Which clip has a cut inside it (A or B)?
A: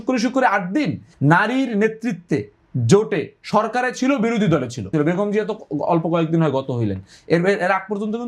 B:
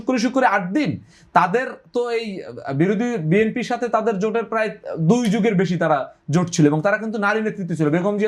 A